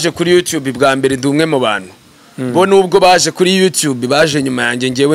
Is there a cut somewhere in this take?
no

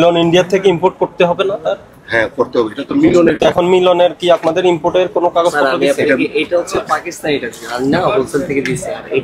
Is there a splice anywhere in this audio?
no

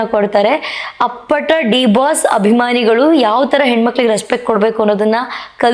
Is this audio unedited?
yes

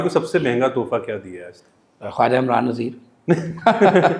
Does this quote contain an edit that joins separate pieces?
no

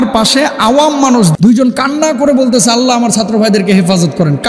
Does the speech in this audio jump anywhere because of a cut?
yes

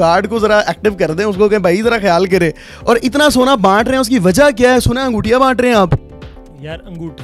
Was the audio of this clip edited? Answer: no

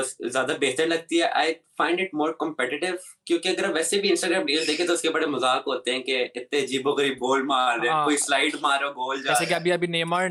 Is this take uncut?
yes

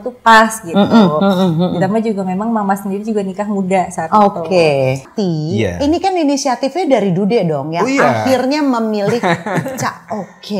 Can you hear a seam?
yes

